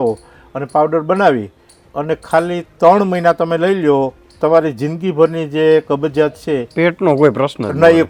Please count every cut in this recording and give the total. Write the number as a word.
zero